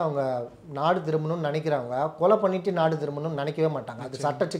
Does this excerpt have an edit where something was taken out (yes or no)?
no